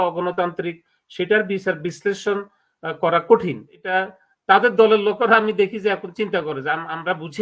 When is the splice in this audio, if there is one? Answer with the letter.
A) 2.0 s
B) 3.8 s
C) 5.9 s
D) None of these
B